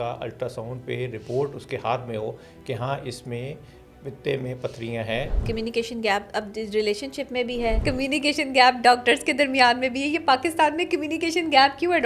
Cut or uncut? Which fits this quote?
cut